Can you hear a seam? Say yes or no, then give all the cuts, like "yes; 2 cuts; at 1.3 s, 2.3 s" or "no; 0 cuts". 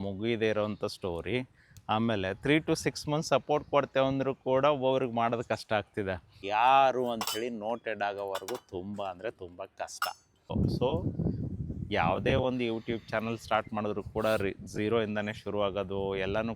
yes; 2 cuts; at 6.4 s, 10.5 s